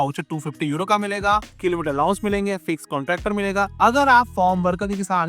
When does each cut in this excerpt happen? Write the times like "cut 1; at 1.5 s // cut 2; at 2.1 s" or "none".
cut 1; at 3.7 s